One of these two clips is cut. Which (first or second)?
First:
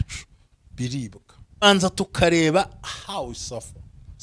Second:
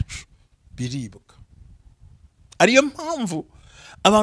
first